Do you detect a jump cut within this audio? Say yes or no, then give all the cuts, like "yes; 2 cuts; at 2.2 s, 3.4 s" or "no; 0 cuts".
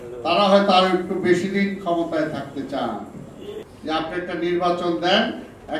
yes; 1 cut; at 3.7 s